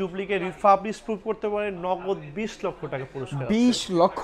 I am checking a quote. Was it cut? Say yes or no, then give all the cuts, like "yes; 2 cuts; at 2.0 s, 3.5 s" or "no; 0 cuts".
no; 0 cuts